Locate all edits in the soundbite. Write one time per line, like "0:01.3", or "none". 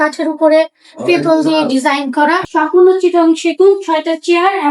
0:02.4